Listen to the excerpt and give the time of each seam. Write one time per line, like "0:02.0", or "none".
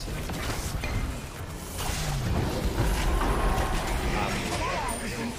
none